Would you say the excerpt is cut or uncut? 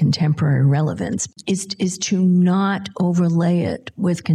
cut